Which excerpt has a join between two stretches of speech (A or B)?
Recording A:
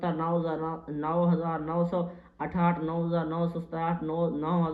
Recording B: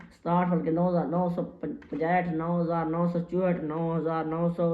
B